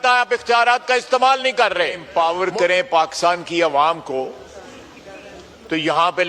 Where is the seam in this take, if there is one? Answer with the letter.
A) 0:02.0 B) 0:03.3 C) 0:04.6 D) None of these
A